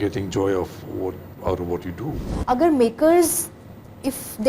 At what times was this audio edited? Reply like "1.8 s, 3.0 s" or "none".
2.3 s